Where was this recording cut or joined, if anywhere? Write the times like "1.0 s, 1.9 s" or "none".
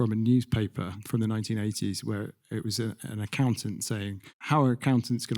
1.0 s